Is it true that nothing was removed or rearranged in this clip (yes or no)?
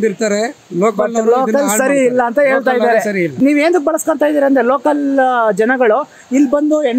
no